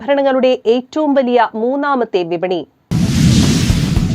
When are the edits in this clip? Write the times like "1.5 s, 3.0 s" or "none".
2.8 s